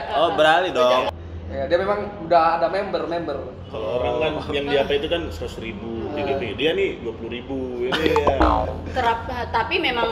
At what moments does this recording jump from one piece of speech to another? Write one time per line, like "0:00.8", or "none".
0:01.1

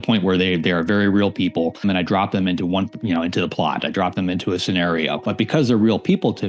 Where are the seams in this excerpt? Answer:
0:01.8
0:05.2

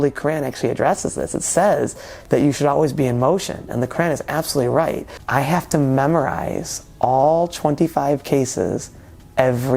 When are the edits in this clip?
0:05.1

